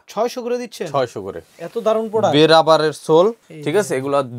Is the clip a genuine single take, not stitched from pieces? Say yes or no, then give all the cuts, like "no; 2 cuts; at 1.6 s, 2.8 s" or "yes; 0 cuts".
yes; 0 cuts